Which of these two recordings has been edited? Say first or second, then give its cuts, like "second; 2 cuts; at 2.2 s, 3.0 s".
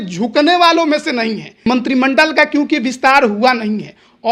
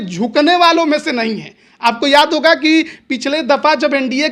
first; 1 cut; at 1.7 s